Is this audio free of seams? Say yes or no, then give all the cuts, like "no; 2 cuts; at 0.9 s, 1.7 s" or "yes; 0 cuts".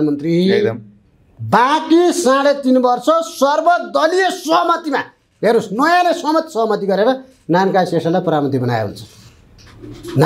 yes; 0 cuts